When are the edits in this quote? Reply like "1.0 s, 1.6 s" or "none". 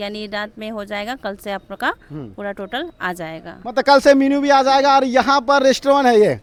none